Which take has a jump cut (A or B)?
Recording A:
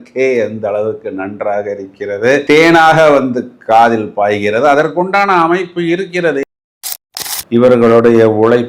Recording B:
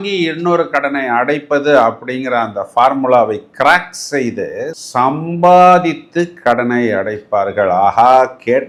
A